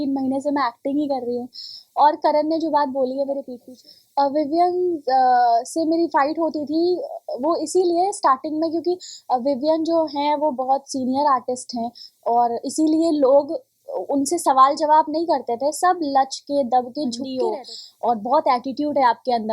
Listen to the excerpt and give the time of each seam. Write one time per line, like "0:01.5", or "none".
0:03.5
0:17.3